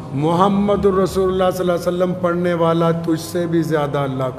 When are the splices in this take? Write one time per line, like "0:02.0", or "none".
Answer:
none